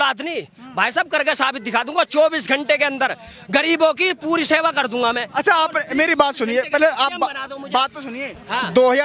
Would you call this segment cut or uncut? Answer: uncut